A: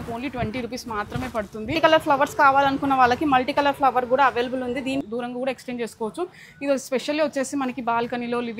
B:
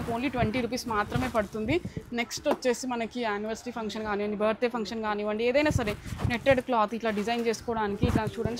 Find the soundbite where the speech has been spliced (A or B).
A